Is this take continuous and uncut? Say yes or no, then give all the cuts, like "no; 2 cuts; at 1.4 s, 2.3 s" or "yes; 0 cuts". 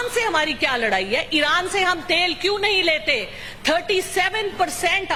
yes; 0 cuts